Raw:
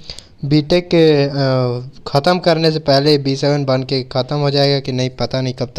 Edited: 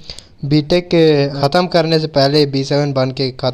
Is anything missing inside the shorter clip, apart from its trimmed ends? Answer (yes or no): yes